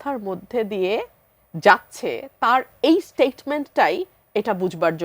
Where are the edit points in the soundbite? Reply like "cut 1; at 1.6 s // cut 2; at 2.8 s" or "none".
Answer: none

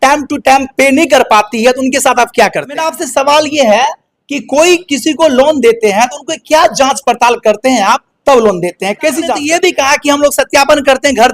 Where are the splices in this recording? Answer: cut 1; at 3.0 s // cut 2; at 9.4 s

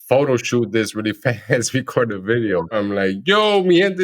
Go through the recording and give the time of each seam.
cut 1; at 2.8 s

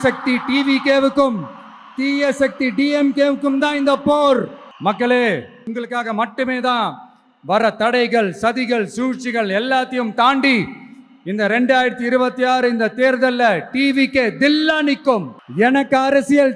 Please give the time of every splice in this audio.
cut 1; at 4.6 s // cut 2; at 5.7 s // cut 3; at 15.4 s

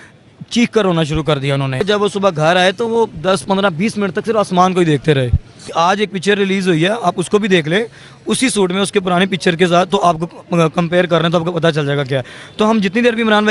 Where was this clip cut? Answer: cut 1; at 1.8 s // cut 2; at 5.7 s

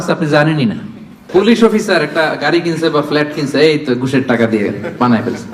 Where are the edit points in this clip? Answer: cut 1; at 1.3 s

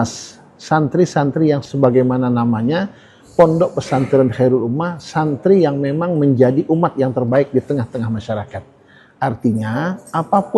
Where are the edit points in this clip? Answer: cut 1; at 1.7 s

